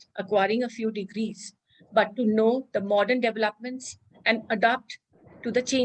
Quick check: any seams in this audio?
no; 0 cuts

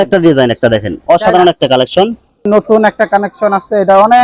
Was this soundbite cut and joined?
yes; 1 cut; at 2.3 s

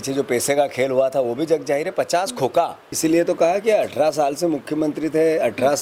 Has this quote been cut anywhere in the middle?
yes; 1 cut; at 2.8 s

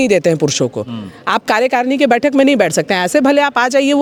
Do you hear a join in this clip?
no; 0 cuts

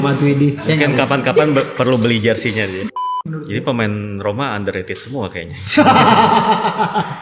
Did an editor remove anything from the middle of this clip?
yes; 1 cut; at 2.9 s

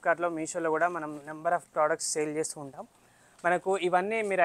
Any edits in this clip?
no; 0 cuts

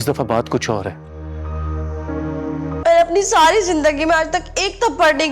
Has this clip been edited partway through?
yes; 1 cut; at 2.7 s

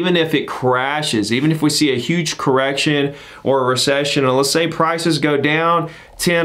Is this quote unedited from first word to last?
yes; 0 cuts

